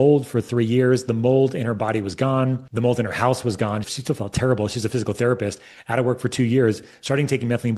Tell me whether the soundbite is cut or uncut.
cut